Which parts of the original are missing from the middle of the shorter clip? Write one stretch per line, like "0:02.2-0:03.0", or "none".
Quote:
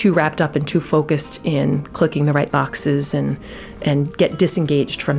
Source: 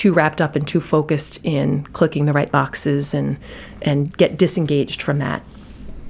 none